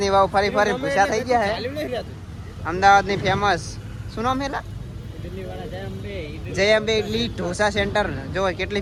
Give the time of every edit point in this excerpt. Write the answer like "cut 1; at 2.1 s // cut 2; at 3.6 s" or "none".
none